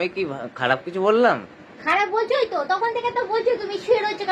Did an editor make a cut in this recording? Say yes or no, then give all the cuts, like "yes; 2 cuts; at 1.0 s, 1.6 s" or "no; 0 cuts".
no; 0 cuts